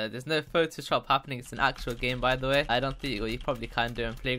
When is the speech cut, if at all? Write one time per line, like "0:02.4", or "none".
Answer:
none